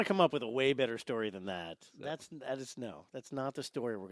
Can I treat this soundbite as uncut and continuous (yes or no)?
yes